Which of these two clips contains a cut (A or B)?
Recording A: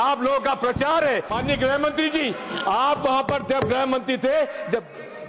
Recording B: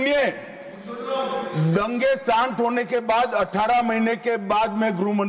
A